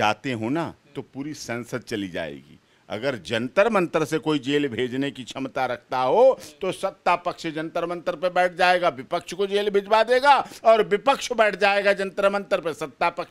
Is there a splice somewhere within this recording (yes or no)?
no